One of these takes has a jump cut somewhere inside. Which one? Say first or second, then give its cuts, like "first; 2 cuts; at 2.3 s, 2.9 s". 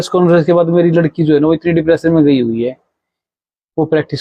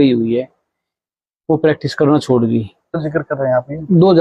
second; 1 cut; at 3.3 s